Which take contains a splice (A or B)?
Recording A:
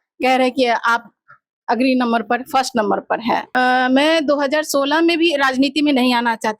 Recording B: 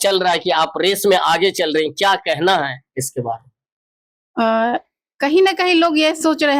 A